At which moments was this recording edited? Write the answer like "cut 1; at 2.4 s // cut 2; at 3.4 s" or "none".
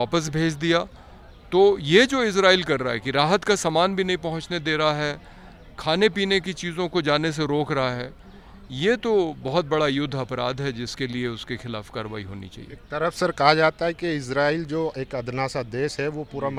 none